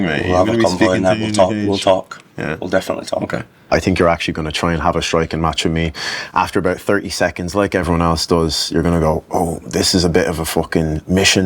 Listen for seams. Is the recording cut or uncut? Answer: cut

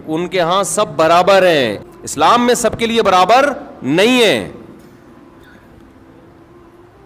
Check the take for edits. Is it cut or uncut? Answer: cut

